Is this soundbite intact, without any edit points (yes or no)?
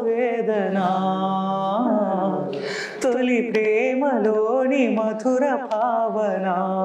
yes